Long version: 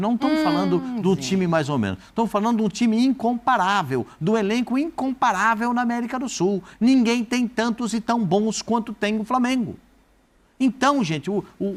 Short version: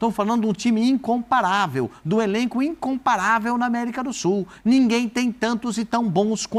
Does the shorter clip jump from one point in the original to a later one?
no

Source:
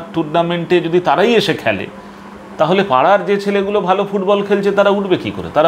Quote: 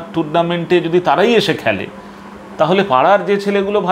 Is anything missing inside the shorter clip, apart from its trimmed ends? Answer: no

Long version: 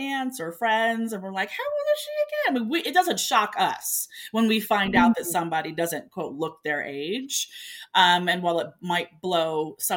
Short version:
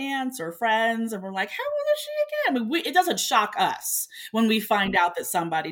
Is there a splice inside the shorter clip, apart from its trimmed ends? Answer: no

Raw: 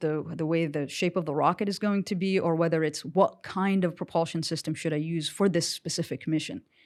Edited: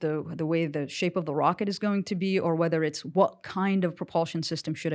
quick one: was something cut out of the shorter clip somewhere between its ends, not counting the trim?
no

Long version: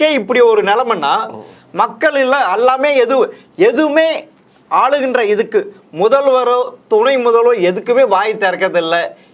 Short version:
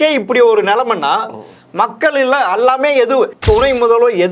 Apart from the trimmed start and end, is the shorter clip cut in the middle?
yes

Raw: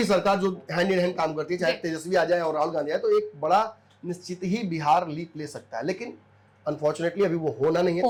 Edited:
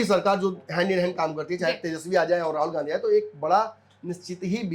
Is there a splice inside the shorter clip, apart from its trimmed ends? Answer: no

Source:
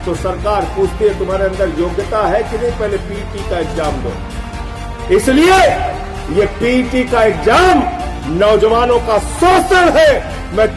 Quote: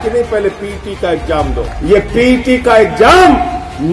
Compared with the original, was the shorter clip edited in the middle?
yes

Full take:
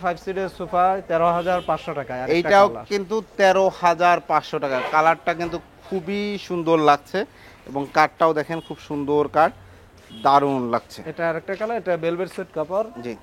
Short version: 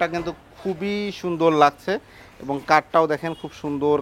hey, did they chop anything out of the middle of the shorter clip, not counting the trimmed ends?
no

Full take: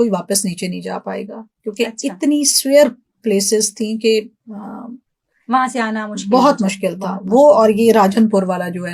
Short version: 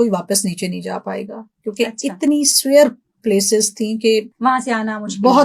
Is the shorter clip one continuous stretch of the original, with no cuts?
no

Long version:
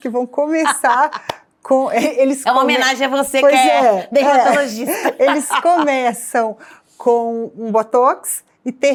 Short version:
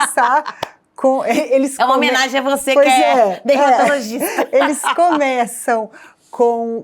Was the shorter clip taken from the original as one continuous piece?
yes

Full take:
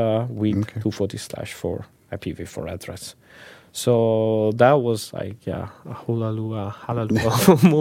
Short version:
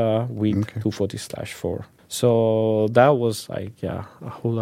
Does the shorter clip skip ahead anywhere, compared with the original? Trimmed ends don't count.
yes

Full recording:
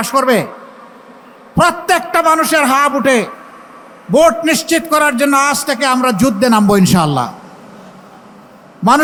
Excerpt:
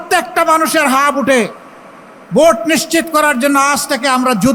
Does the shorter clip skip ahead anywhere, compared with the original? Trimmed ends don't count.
no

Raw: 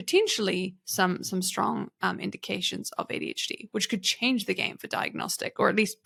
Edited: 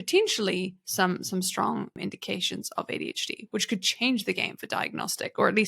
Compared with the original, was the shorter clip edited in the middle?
yes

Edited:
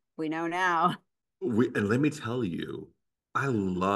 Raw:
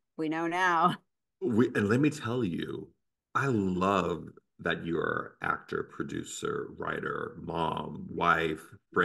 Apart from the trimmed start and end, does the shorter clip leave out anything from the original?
no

